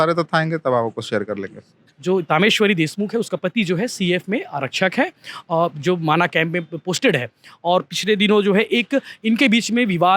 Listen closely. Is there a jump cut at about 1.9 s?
yes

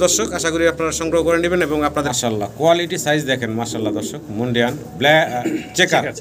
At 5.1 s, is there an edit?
no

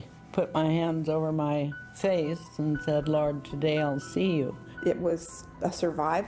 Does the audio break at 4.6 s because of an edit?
yes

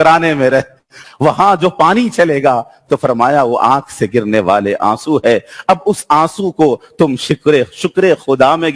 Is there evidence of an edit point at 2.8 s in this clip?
no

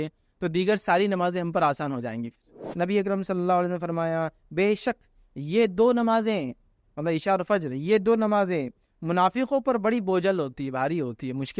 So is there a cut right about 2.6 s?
yes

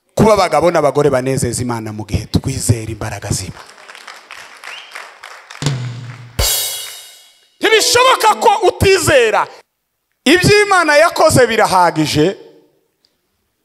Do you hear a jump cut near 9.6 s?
yes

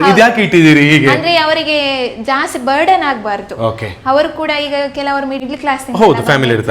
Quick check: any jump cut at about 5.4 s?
yes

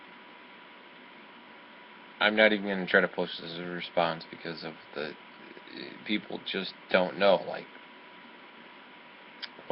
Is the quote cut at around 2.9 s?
yes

